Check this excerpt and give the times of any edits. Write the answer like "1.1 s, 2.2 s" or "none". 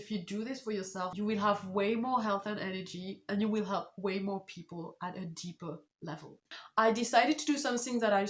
1.1 s, 6.6 s